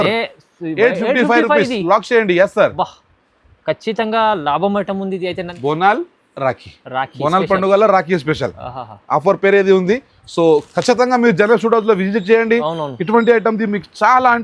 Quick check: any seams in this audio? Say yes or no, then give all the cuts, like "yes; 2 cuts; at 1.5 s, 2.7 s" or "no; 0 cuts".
yes; 1 cut; at 5.5 s